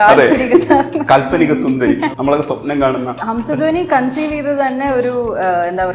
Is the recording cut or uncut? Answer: cut